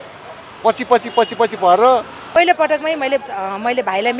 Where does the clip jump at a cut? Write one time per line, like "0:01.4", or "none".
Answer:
0:02.2